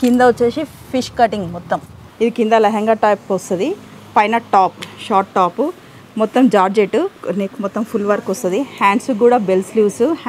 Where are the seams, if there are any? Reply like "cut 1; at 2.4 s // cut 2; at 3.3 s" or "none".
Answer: cut 1; at 2.0 s // cut 2; at 7.2 s